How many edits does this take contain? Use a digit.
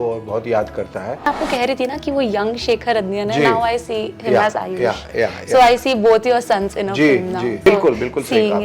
2